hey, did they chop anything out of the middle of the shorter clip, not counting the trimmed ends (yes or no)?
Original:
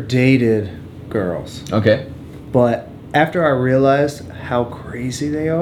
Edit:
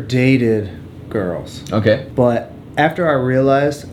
yes